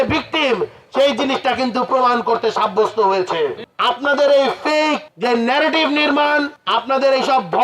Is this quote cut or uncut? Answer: cut